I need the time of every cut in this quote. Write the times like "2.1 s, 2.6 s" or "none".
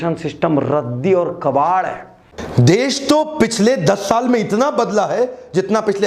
2.3 s